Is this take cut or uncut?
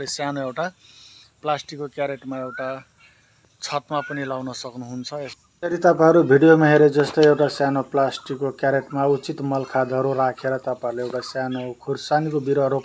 uncut